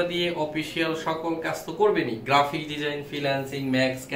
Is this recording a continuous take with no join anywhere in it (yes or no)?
yes